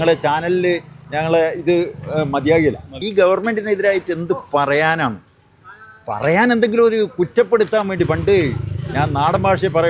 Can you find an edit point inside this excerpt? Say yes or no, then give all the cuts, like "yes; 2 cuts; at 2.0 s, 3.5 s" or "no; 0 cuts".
yes; 1 cut; at 2.9 s